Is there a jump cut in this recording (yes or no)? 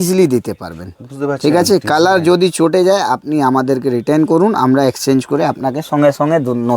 no